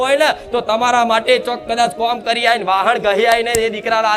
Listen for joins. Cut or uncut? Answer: uncut